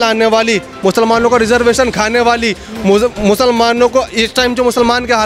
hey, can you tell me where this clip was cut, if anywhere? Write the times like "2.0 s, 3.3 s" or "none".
none